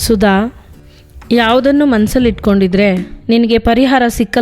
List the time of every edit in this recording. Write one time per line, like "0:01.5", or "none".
0:01.1